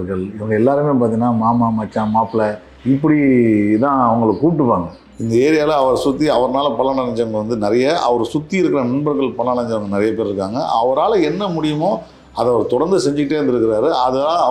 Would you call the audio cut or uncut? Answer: cut